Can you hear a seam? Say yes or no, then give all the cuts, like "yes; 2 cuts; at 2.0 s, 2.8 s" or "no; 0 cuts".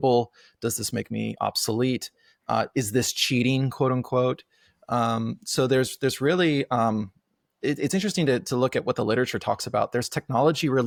no; 0 cuts